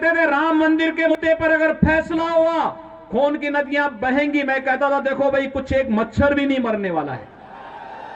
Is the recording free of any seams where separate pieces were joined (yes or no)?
no